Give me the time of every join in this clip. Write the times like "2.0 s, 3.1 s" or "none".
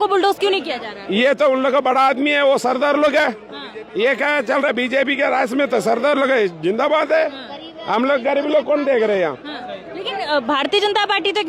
none